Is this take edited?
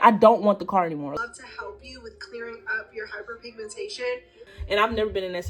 yes; 2 cuts; at 1.1 s, 4.4 s

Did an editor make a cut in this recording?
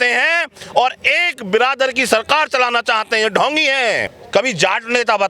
yes; 1 cut; at 4.1 s

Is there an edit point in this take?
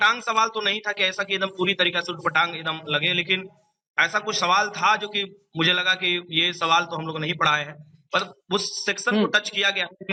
no; 0 cuts

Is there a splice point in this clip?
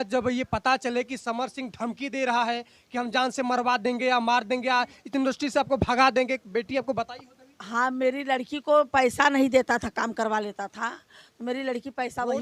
no; 0 cuts

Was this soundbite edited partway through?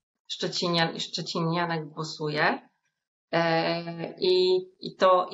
no; 0 cuts

